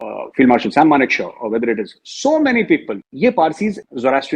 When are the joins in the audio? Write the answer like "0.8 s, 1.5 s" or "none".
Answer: 3.0 s